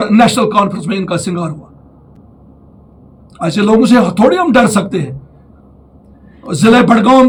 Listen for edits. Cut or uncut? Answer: uncut